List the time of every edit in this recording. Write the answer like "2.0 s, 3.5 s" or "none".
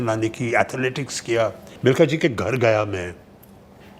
1.7 s